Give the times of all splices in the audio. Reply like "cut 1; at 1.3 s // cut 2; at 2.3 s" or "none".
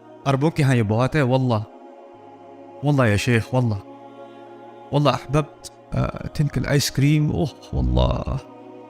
none